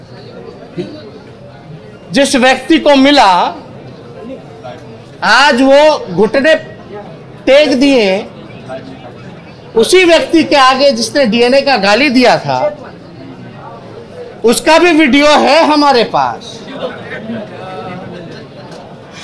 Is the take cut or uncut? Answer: uncut